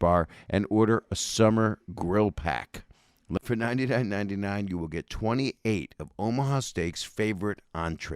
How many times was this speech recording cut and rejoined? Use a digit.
1